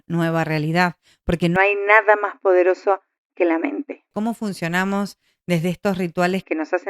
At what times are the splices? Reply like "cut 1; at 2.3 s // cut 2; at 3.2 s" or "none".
cut 1; at 4.1 s

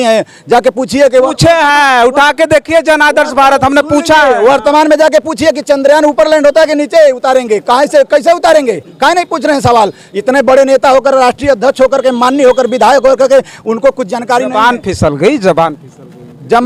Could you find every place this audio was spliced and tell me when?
none

